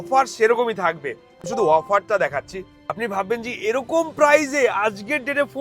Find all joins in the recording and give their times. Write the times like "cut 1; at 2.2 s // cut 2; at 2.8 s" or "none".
cut 1; at 1.5 s // cut 2; at 2.8 s